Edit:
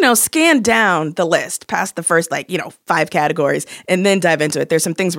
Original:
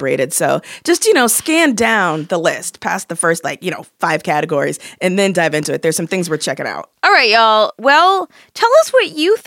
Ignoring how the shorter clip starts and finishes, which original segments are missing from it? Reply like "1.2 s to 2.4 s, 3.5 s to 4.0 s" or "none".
none